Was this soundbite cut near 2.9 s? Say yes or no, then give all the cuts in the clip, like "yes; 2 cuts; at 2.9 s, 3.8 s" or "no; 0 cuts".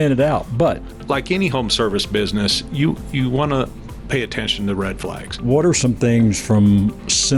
no; 2 cuts; at 0.9 s, 5.4 s